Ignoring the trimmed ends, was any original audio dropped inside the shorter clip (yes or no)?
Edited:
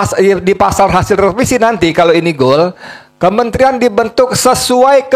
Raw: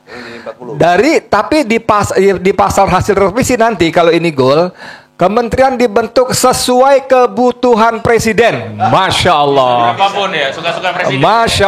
no